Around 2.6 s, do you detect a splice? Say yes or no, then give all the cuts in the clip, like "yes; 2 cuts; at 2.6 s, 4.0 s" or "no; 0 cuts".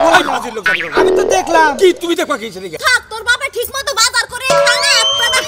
yes; 1 cut; at 2.6 s